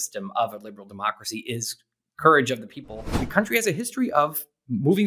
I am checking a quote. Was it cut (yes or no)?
yes